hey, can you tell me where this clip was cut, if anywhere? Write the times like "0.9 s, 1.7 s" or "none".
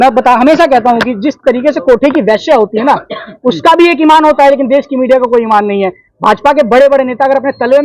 1.1 s